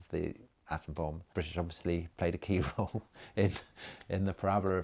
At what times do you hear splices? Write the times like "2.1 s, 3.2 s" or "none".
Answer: 1.2 s